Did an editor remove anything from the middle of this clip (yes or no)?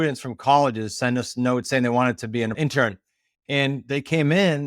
yes